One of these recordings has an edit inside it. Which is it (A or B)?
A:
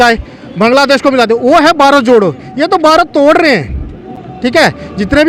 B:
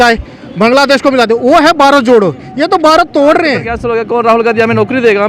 B